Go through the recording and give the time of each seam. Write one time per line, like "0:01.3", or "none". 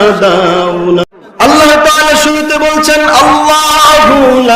0:01.1